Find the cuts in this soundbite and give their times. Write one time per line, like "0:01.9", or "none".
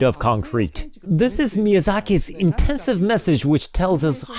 0:01.0